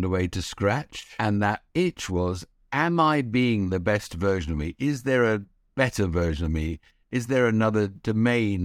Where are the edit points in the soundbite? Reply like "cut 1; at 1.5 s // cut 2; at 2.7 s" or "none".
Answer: cut 1; at 1.0 s